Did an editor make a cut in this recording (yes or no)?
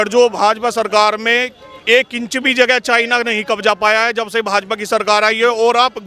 no